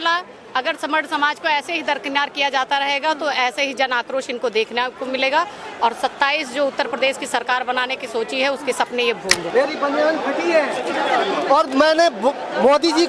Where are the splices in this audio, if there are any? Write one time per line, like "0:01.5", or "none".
0:09.5